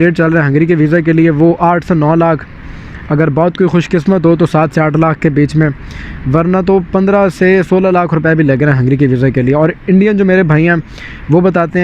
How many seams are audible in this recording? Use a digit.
0